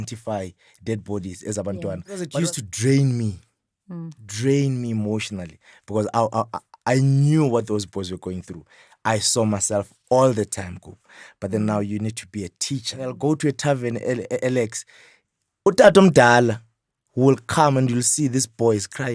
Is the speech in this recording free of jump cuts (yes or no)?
no